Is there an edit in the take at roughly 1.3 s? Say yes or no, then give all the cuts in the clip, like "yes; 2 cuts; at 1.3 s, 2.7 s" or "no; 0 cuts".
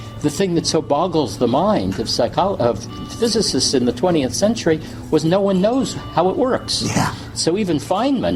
no; 0 cuts